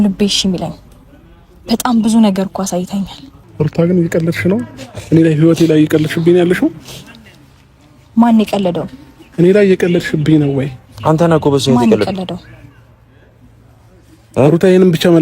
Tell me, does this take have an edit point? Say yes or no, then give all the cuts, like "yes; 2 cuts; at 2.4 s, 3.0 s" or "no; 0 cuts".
yes; 1 cut; at 3.4 s